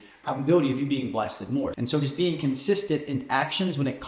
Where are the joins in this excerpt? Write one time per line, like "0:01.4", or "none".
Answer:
0:01.8